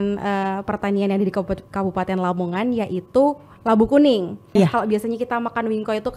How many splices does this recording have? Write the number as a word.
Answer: one